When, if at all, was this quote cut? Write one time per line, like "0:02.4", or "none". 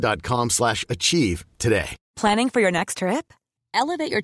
0:02.0